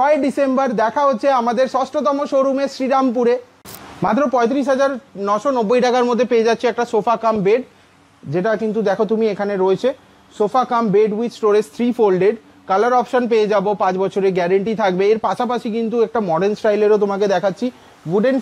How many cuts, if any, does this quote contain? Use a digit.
0